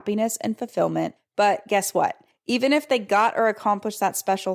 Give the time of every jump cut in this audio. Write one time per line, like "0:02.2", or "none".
0:01.2
0:02.3